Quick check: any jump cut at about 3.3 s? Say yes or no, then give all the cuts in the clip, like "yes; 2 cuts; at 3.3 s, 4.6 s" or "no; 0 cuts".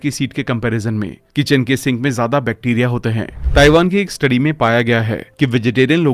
yes; 1 cut; at 3.3 s